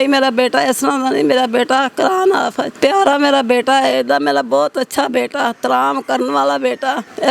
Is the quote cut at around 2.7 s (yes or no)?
yes